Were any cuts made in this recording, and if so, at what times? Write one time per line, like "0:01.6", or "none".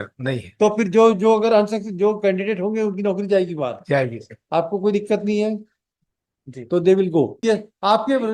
0:07.4